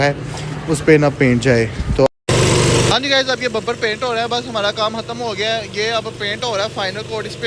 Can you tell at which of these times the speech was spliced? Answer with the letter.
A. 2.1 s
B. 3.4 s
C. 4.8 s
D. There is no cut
A